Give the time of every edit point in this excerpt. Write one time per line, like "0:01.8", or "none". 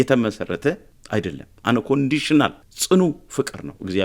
0:00.9
0:02.7